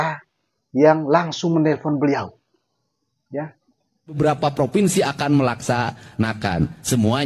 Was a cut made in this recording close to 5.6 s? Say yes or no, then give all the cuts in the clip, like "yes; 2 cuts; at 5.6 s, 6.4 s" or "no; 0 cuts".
no; 1 cut; at 4.2 s